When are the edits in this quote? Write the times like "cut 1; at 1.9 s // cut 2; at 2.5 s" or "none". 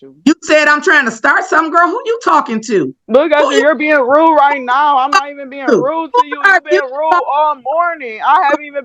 cut 1; at 3.0 s